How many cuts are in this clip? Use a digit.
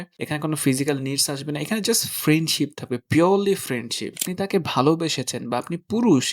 1